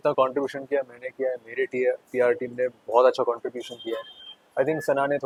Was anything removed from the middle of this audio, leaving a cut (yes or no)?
no